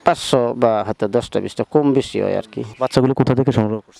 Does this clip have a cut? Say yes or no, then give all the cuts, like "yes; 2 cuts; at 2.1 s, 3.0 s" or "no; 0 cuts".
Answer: yes; 1 cut; at 2.7 s